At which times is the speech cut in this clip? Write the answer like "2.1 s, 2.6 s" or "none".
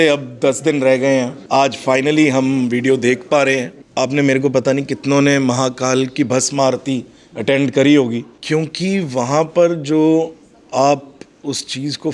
1.4 s, 3.8 s, 8.3 s

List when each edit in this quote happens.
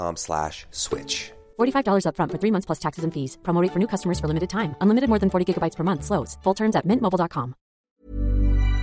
7.9 s

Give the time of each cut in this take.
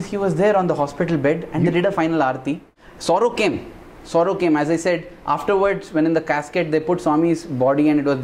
2.6 s

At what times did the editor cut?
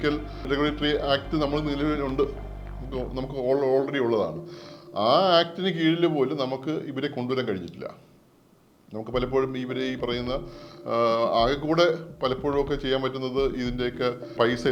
none

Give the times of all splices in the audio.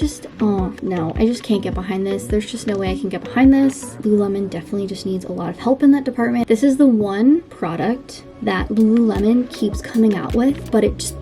3.9 s, 6.4 s

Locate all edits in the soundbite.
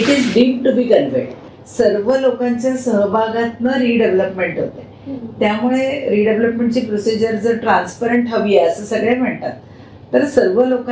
1.4 s

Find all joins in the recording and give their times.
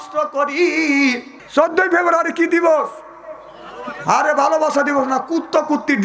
1.3 s

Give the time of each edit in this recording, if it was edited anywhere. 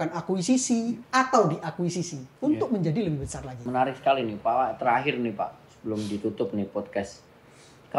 2.2 s, 3.6 s

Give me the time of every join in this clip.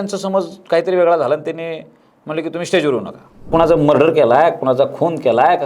3.5 s

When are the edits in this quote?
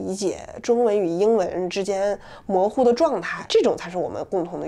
3.3 s

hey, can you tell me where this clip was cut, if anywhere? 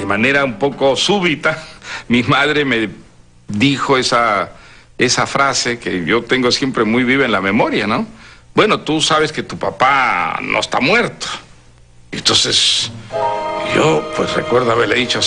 7.0 s

